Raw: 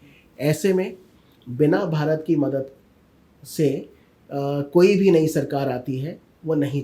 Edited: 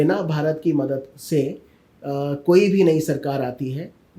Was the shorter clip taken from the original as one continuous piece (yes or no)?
no